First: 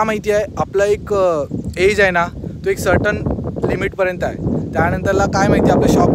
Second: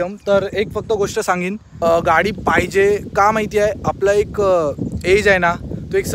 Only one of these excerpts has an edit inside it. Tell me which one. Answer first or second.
second